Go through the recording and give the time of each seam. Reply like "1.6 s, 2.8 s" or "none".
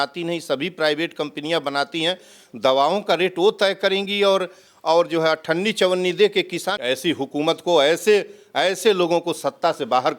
6.7 s